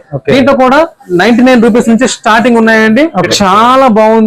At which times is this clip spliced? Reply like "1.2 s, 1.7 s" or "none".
3.3 s